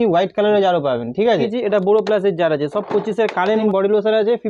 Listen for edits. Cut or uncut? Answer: cut